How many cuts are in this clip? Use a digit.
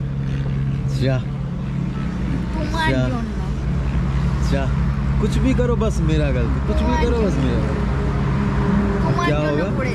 0